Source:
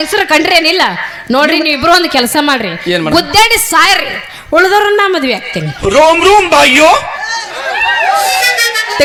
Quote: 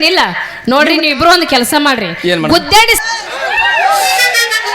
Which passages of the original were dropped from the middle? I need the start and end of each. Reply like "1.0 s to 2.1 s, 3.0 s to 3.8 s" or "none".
3.6 s to 7.2 s